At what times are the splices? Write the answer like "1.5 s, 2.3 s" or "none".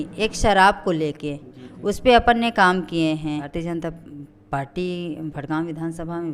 3.5 s